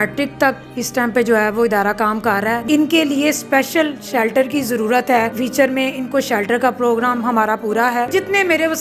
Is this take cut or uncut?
cut